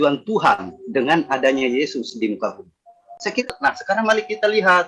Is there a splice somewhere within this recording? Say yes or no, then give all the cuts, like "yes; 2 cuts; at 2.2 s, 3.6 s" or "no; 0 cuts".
yes; 1 cut; at 3.4 s